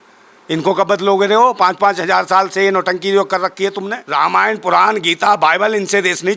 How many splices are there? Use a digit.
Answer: 1